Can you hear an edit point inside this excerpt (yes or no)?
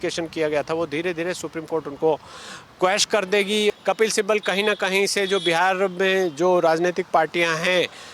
yes